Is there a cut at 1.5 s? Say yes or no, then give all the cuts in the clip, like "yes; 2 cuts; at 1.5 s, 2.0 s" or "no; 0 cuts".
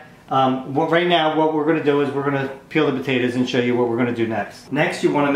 no; 1 cut; at 3.4 s